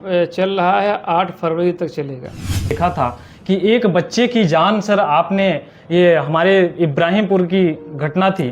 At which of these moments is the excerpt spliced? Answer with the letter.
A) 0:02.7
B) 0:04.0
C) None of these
A